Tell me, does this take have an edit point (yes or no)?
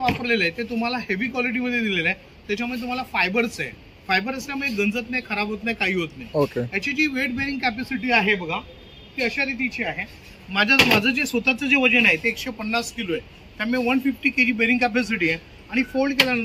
no